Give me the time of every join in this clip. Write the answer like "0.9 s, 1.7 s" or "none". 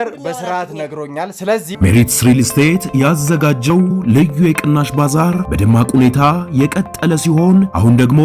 1.7 s